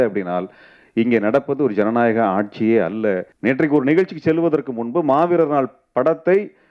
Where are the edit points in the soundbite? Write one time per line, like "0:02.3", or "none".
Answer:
0:03.3